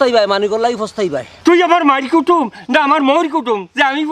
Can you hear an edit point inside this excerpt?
yes; 1 cut; at 1.3 s

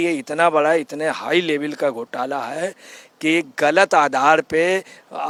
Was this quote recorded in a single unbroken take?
yes; 0 cuts

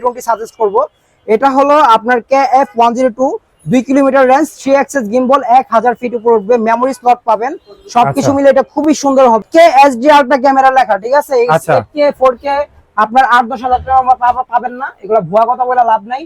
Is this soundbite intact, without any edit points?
no; 1 cut; at 9.4 s

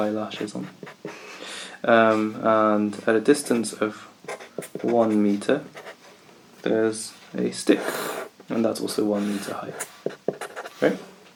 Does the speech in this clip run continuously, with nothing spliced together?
yes; 0 cuts

